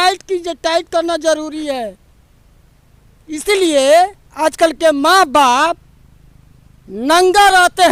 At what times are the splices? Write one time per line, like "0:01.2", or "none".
none